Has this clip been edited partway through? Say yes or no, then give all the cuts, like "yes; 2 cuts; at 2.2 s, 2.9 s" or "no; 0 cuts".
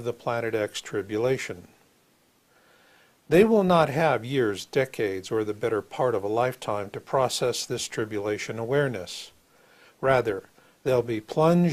no; 0 cuts